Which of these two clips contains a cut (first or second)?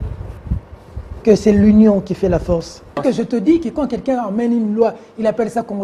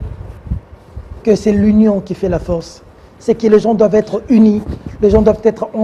first